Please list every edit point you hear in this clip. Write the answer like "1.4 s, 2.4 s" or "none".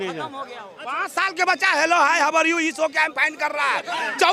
0.9 s